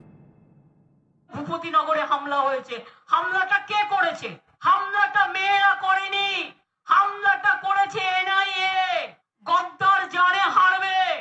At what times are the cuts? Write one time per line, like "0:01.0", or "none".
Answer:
0:01.2